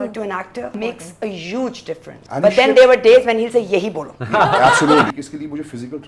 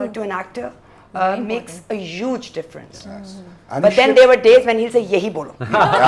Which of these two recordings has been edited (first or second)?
first